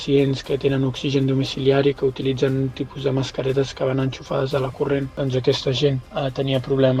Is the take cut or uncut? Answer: uncut